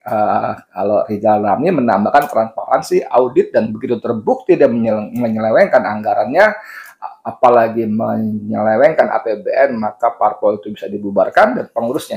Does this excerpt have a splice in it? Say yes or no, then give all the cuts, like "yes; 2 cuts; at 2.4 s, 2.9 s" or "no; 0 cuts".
no; 0 cuts